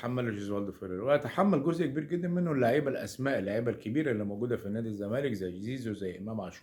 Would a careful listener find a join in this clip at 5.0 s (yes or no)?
no